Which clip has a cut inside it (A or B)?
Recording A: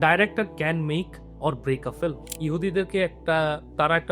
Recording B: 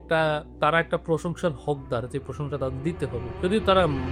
A